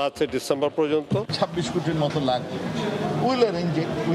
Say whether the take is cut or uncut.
cut